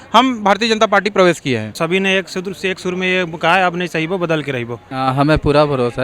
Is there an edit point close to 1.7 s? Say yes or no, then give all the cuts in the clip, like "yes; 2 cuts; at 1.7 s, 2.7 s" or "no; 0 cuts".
yes; 2 cuts; at 1.7 s, 4.9 s